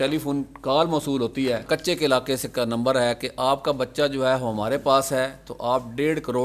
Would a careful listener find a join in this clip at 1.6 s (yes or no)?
yes